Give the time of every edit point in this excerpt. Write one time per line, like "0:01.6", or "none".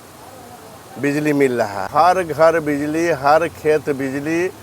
0:01.9

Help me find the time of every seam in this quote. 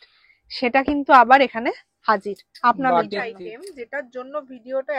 0:03.3

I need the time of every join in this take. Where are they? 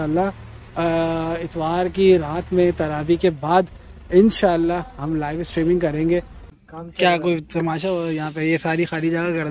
0:06.5

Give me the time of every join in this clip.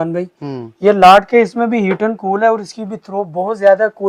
none

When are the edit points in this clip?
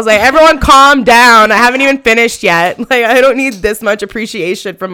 none

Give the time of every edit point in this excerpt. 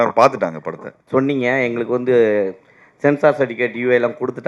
0:01.0

